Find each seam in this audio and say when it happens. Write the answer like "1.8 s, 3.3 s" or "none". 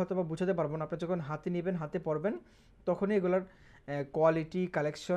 none